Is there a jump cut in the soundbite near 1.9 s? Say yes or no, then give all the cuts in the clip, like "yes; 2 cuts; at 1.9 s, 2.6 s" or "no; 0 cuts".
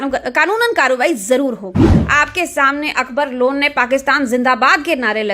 yes; 1 cut; at 1.9 s